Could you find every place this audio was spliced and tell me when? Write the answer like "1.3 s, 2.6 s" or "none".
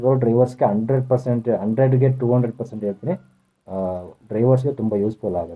none

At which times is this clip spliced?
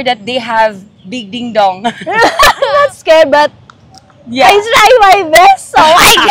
2.7 s

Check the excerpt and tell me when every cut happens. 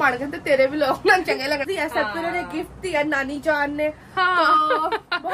1.6 s

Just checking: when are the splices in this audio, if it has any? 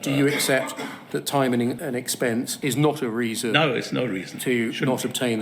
2.1 s

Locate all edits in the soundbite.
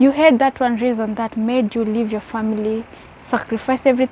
none

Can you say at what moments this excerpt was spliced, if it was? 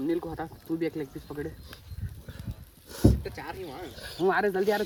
none

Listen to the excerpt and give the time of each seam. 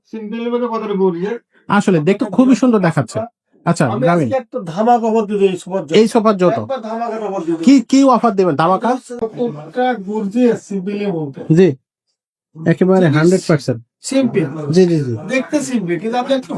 9.1 s

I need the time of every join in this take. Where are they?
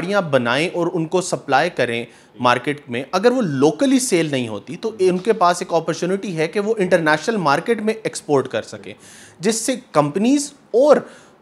none

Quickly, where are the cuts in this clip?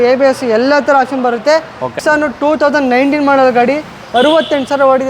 2.0 s

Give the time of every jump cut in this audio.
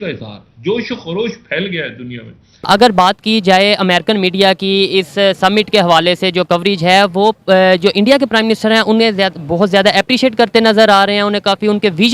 2.7 s

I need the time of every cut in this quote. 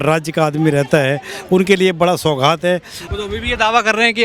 3.0 s

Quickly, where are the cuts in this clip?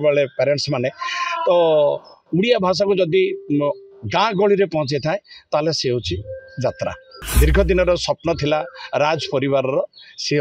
7.2 s

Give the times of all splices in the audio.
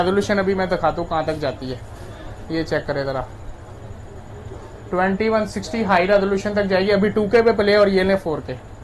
none

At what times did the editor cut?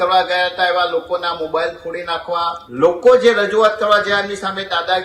2.6 s

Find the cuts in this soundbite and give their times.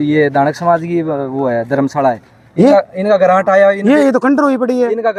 none

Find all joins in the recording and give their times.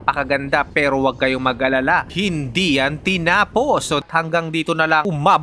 2.1 s, 4.0 s

